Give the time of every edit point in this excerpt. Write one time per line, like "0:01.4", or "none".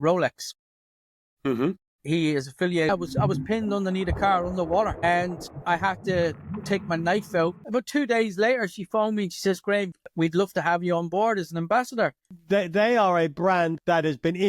0:02.9
0:07.6
0:10.0
0:12.2